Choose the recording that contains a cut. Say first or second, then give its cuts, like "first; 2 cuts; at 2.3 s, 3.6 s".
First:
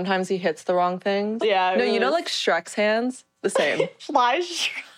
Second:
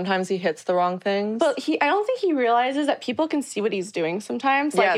first; 2 cuts; at 1.3 s, 4.0 s